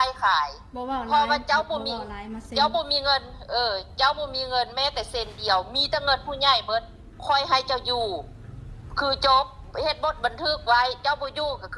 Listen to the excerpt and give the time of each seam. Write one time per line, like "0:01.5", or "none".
none